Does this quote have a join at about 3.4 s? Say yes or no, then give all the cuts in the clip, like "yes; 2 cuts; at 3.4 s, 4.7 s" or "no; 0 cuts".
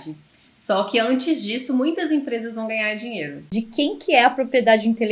yes; 1 cut; at 3.4 s